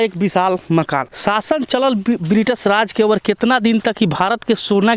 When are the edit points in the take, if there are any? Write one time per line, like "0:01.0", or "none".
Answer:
0:01.0